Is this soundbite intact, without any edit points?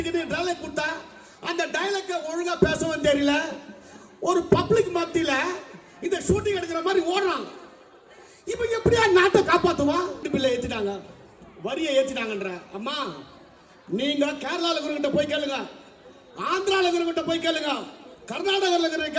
no; 1 cut; at 10.2 s

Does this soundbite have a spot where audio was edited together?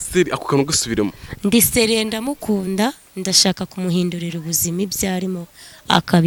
no; 0 cuts

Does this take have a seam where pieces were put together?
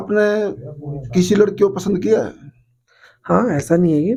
no; 0 cuts

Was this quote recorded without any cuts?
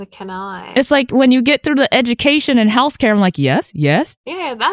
yes; 0 cuts

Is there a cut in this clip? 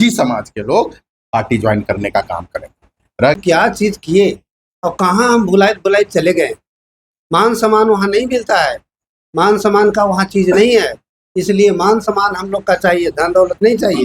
yes; 1 cut; at 3.4 s

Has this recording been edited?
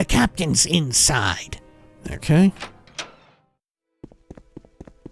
no; 0 cuts

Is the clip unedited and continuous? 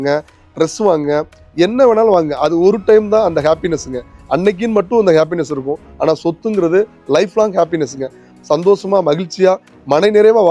no; 1 cut; at 8.3 s

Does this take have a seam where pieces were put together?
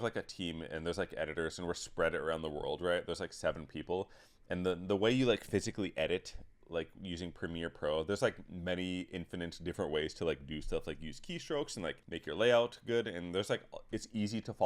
yes; 1 cut; at 12.1 s

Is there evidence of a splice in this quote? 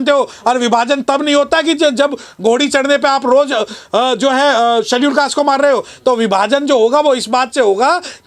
no; 0 cuts

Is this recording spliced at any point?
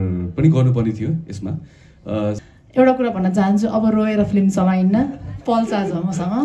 yes; 1 cut; at 2.4 s

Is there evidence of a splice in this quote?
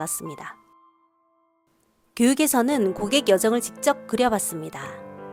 no; 0 cuts

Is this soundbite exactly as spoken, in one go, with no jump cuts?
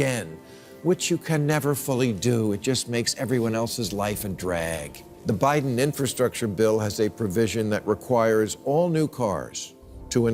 no; 1 cut; at 5.0 s

